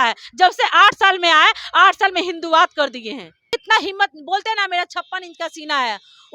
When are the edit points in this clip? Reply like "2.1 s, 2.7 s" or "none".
3.5 s